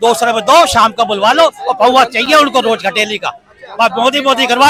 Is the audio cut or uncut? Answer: uncut